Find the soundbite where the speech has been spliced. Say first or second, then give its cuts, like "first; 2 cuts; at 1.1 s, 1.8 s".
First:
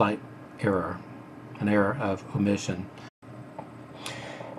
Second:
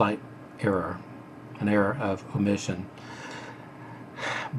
second; 1 cut; at 3.1 s